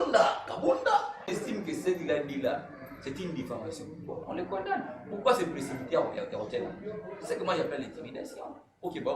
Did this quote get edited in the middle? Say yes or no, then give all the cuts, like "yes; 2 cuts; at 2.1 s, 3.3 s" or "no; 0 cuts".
yes; 1 cut; at 1.3 s